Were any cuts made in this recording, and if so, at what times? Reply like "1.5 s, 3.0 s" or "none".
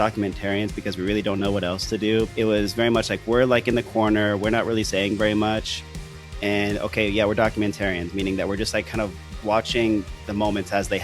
2.3 s